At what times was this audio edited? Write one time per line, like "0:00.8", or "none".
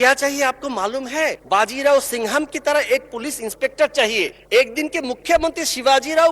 0:01.4
0:04.4